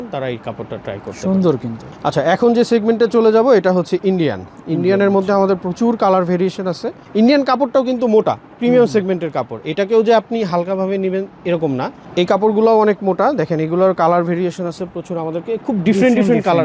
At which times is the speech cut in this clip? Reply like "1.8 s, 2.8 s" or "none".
none